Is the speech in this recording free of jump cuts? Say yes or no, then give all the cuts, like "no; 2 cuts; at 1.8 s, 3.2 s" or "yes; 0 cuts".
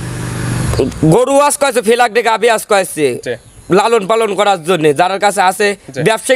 yes; 0 cuts